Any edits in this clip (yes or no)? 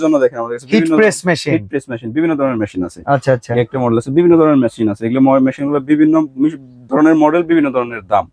no